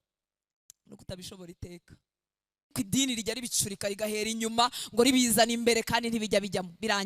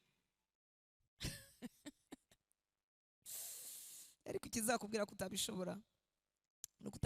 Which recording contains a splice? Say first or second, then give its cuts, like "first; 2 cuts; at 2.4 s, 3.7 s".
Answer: first; 1 cut; at 2.7 s